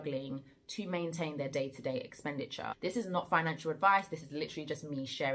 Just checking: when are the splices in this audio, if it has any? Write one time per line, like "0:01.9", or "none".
0:02.8